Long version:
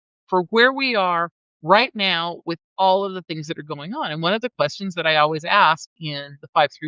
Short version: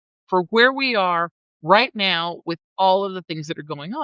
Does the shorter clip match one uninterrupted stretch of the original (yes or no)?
yes